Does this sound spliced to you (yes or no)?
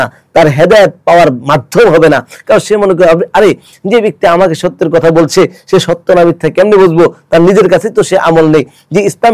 no